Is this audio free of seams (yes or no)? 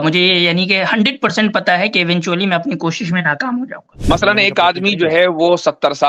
no